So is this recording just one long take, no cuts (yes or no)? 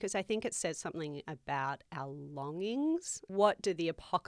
no